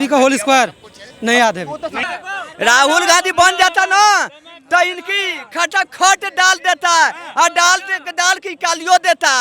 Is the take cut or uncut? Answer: cut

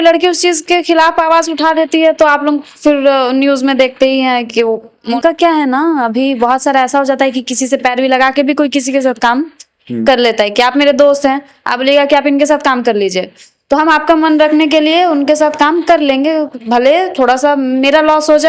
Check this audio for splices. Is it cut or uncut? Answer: cut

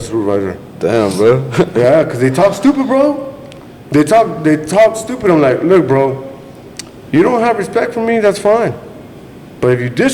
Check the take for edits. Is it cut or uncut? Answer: uncut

